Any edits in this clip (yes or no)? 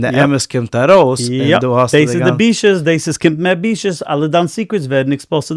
no